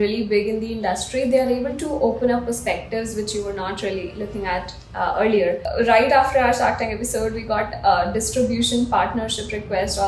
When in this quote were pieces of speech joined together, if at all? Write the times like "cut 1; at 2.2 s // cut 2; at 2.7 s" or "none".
cut 1; at 5.6 s